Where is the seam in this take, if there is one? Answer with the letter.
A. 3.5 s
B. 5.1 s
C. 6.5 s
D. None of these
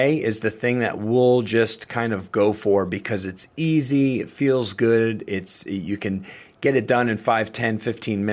D